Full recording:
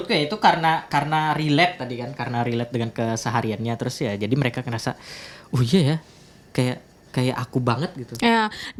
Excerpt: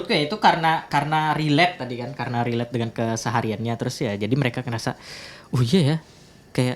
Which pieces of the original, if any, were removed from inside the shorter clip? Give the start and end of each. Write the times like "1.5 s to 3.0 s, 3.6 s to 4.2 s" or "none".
none